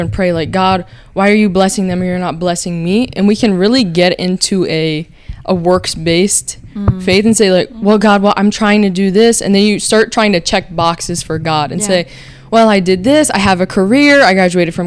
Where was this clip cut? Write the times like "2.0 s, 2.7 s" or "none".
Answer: none